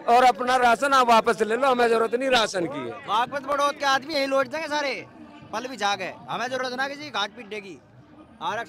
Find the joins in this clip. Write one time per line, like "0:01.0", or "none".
0:03.0